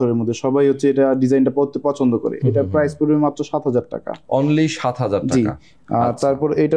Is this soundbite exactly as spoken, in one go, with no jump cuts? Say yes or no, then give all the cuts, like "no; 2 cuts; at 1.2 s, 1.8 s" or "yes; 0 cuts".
yes; 0 cuts